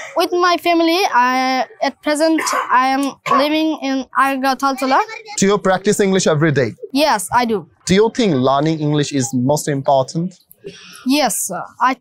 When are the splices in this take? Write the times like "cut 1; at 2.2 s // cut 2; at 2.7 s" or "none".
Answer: cut 1; at 7.7 s

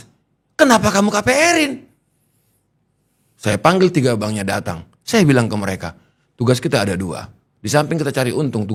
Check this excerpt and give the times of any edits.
none

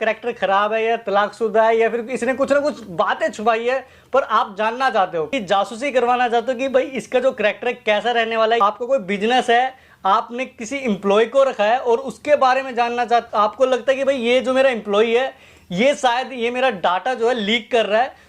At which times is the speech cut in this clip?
cut 1; at 5.3 s // cut 2; at 8.6 s // cut 3; at 13.3 s

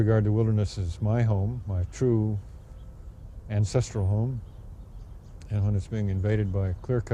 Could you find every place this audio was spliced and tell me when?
none

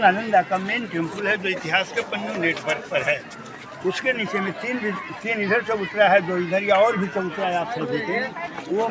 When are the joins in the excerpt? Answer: none

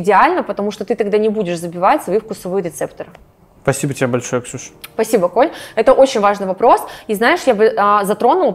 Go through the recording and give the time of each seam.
none

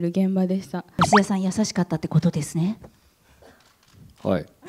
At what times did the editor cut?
cut 1; at 1.0 s

